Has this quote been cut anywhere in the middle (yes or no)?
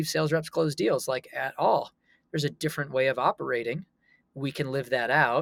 no